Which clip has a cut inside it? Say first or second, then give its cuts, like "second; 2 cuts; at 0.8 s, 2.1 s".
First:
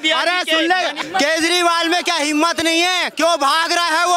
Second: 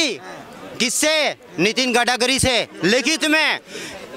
first; 1 cut; at 1.0 s